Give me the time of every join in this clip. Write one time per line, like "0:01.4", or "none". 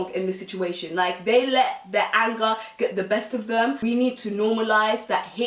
0:03.8